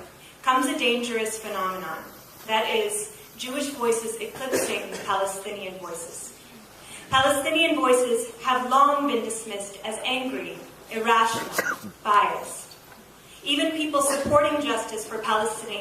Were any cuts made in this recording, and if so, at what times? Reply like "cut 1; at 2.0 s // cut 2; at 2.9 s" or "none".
cut 1; at 11.0 s

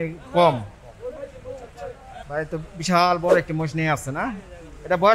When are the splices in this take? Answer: cut 1; at 2.2 s

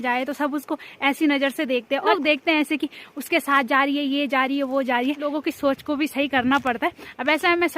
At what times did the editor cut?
cut 1; at 2.1 s // cut 2; at 5.2 s

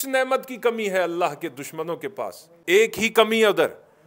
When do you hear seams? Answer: cut 1; at 2.5 s

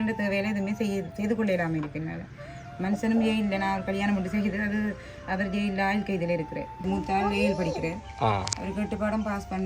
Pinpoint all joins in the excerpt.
cut 1; at 6.8 s

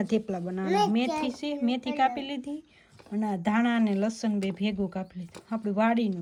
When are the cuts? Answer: none

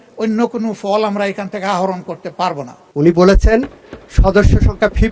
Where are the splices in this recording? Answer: cut 1; at 2.8 s

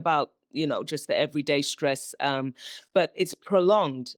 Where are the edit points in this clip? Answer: none

